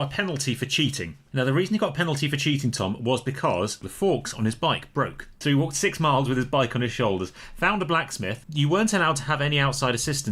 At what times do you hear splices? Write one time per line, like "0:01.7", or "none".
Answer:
0:03.8
0:05.2